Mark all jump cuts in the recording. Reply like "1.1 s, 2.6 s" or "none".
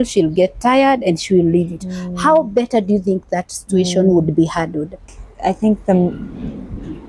5.2 s